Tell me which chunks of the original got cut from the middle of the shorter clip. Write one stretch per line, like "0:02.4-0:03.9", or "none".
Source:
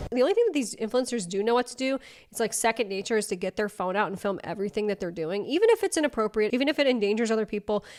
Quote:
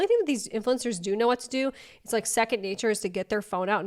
none